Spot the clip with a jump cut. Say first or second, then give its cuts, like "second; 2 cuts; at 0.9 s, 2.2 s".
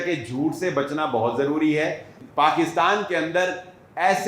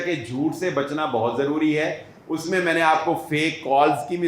first; 1 cut; at 2.1 s